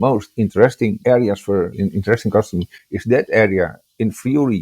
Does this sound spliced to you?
yes; 2 cuts; at 1.0 s, 1.8 s

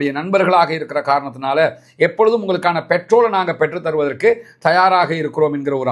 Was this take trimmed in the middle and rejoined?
no; 0 cuts

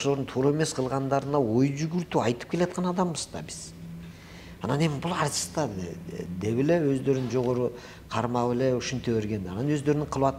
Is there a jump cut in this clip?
no; 0 cuts

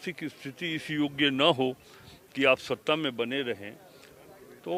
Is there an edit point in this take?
no; 0 cuts

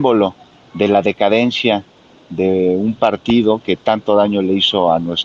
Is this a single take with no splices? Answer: yes; 0 cuts

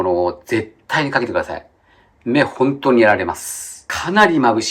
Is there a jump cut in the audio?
no; 0 cuts

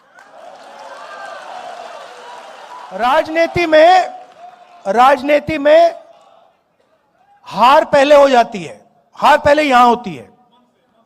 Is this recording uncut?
no; 1 cut; at 3.0 s

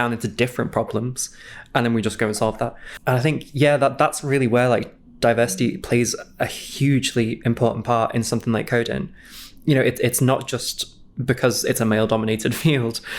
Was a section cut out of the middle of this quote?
yes; 2 cuts; at 2.9 s, 6.6 s

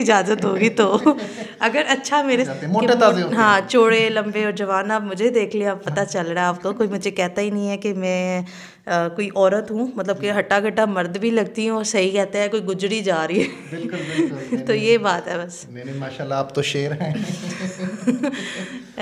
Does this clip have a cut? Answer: yes; 1 cut; at 2.5 s

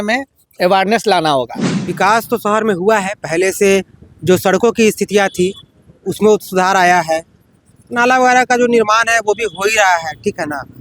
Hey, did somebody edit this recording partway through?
yes; 1 cut; at 1.8 s

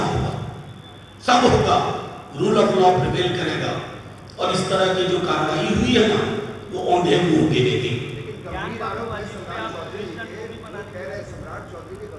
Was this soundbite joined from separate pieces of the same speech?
no; 0 cuts

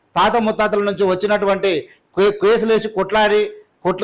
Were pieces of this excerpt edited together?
no; 0 cuts

